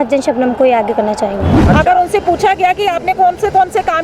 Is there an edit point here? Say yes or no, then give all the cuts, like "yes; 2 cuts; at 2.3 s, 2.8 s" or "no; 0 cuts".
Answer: yes; 1 cut; at 1.6 s